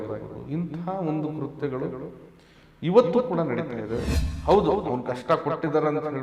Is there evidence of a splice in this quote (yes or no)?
yes